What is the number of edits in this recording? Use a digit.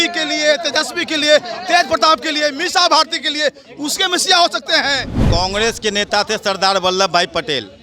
1